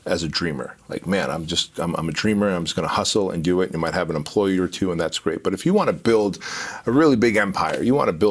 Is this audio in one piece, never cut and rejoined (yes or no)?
yes